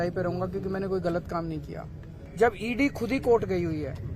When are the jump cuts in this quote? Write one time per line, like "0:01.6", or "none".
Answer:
0:02.2

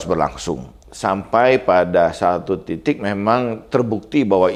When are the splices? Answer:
none

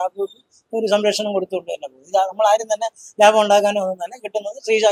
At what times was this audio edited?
none

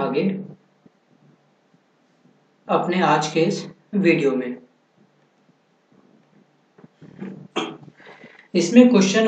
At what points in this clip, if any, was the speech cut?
0:04.7

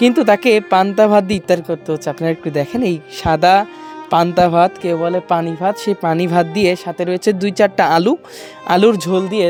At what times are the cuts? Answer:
none

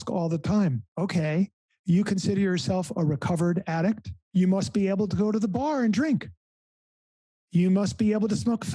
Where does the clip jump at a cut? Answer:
0:00.9
0:04.1

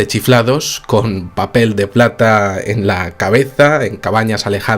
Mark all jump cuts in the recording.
0:03.5

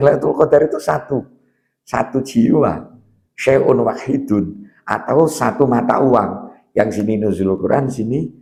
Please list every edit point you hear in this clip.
none

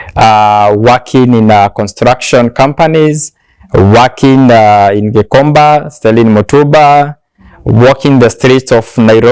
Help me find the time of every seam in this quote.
none

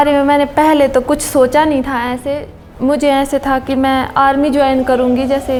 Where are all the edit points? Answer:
none

